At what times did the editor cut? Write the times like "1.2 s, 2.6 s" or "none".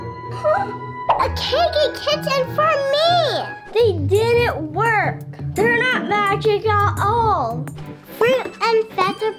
none